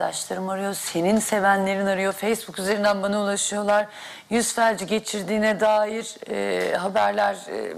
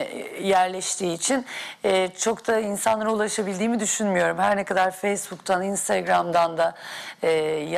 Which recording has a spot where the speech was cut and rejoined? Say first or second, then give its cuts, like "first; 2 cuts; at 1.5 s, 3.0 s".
first; 1 cut; at 1.0 s